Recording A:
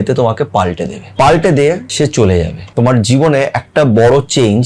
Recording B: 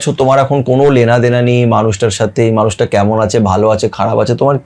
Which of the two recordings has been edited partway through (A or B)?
A